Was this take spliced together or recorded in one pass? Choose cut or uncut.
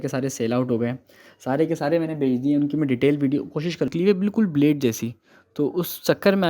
cut